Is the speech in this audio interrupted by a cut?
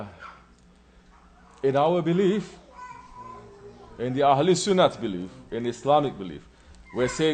yes; 1 cut; at 4.6 s

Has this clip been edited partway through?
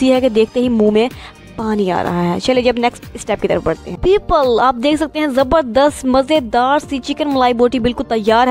yes; 1 cut; at 4.0 s

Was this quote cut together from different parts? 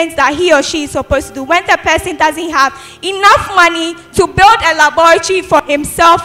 no; 0 cuts

